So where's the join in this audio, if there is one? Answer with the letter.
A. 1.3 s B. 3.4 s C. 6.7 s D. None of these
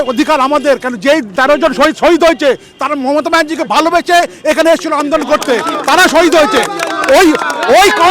A